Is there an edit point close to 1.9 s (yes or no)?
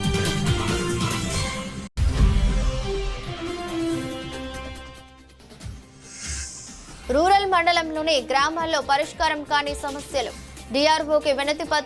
yes